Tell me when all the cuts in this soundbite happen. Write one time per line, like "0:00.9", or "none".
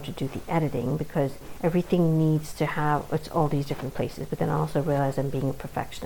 0:01.4